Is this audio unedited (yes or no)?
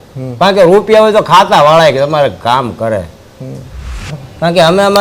no